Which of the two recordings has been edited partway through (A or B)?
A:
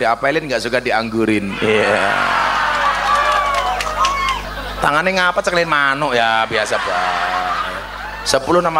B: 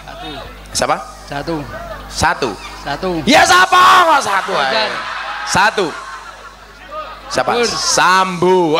A